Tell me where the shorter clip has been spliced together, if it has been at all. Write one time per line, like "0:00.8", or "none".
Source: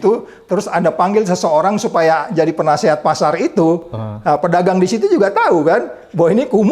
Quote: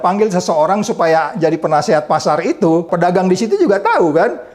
0:02.9